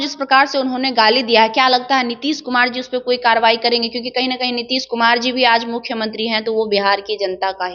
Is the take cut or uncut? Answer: uncut